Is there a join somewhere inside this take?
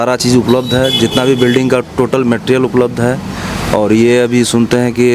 no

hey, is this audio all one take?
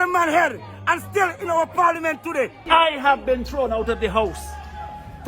no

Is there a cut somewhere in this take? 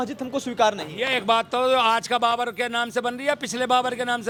no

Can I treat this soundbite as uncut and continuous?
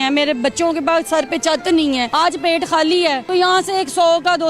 no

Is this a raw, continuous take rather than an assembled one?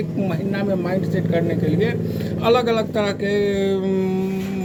yes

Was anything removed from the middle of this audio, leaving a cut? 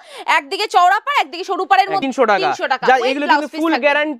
yes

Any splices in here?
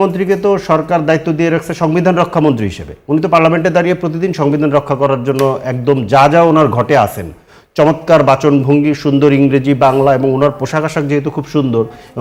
no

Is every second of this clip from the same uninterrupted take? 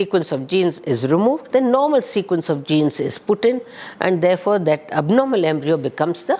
no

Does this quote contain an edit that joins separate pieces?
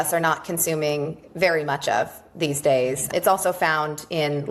no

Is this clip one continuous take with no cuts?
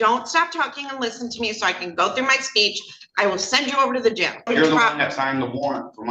no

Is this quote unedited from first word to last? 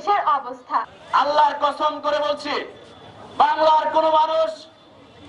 no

